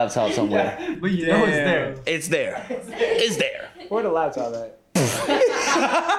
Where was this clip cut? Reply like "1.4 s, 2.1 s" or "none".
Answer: none